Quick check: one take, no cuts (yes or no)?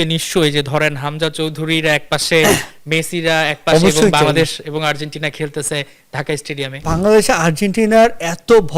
no